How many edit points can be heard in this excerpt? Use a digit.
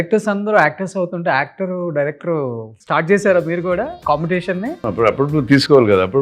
3